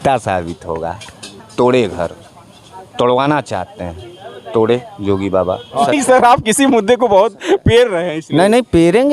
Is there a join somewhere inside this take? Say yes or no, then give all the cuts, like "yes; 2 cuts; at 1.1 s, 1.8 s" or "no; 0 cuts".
yes; 1 cut; at 5.9 s